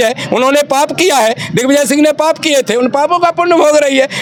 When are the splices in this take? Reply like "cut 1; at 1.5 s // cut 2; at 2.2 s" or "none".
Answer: none